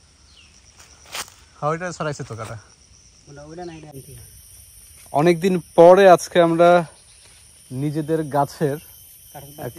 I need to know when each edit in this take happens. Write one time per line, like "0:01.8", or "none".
none